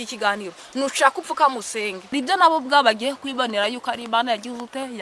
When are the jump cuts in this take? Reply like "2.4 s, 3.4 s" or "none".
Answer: 2.1 s